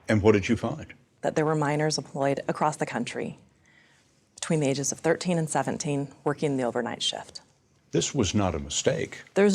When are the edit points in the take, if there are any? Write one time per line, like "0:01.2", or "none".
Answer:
0:01.0